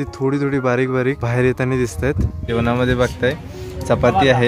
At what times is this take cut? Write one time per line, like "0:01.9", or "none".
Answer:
0:01.2
0:02.5